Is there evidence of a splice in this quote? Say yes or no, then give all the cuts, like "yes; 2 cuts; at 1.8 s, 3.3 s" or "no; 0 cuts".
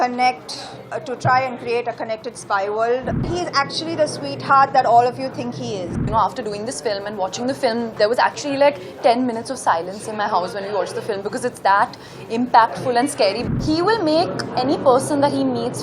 yes; 3 cuts; at 3.2 s, 6.0 s, 13.4 s